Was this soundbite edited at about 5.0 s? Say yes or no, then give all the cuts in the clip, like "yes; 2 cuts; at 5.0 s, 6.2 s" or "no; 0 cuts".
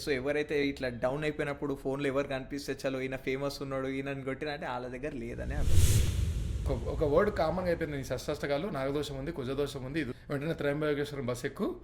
no; 2 cuts; at 6.5 s, 10.2 s